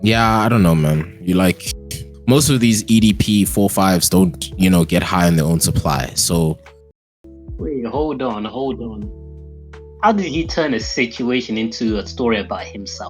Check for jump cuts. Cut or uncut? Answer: cut